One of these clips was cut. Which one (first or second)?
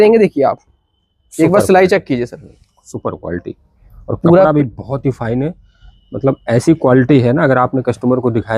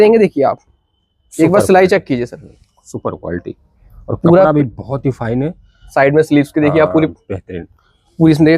second